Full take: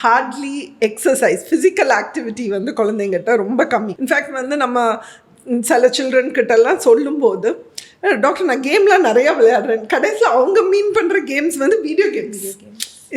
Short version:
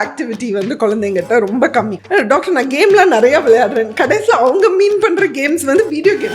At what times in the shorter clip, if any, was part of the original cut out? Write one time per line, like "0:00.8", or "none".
0:02.0

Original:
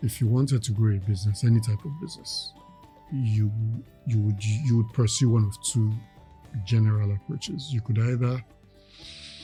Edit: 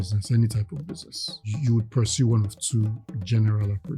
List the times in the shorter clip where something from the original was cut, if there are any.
0:01.4
0:03.1

